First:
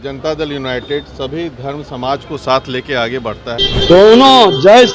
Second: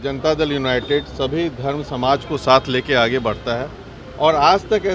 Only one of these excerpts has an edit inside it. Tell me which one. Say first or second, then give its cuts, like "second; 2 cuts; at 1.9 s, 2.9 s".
first; 1 cut; at 3.6 s